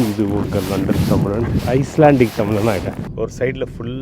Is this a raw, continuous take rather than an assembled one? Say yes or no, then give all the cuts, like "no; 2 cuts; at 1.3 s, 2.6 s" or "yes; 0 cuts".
no; 2 cuts; at 1.6 s, 3.0 s